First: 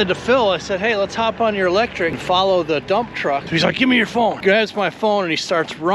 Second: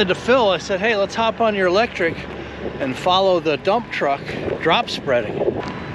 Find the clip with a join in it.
first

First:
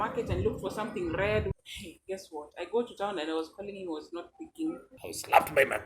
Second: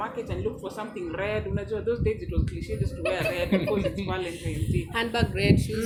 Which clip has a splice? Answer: first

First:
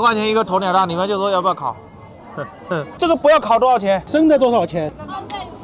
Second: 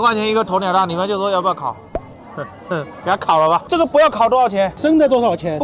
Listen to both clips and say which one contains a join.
first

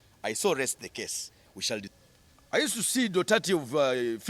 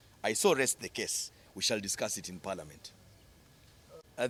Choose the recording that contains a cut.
first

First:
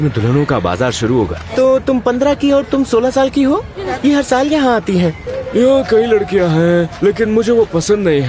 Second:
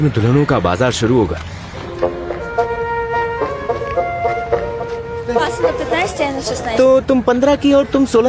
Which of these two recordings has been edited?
first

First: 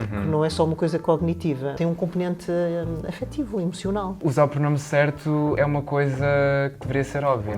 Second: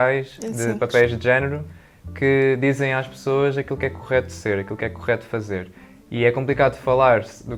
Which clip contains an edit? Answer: first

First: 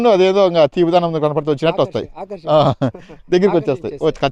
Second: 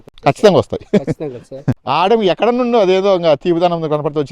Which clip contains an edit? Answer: second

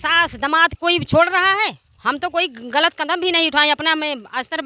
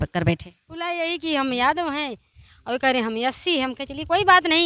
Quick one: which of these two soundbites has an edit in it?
second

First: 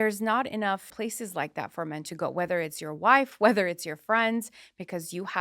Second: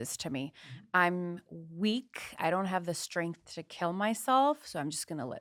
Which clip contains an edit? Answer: first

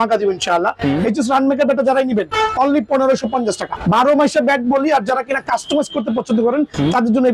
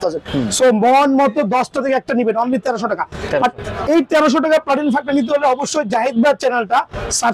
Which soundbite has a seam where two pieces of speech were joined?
first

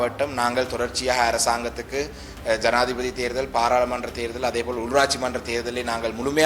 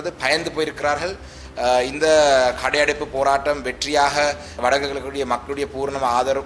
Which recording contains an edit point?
second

